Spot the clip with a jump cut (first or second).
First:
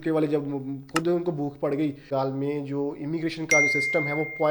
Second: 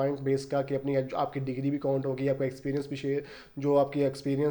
first